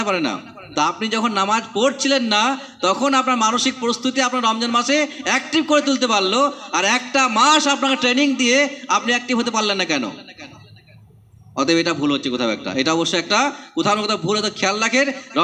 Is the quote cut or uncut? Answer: uncut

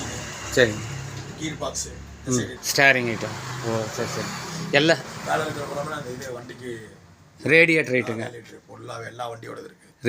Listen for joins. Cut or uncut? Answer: cut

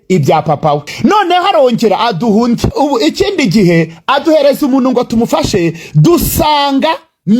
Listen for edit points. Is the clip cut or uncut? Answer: cut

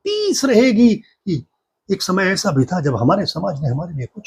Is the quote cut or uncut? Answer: uncut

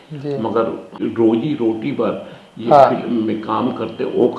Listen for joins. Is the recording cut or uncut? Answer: cut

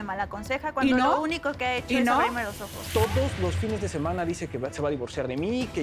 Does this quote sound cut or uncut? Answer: cut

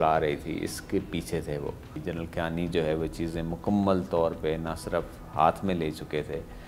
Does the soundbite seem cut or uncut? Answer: cut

